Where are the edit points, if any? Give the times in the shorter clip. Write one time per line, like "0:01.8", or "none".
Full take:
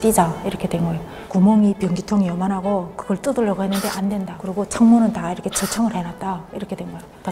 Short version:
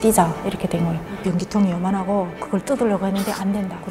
0:01.2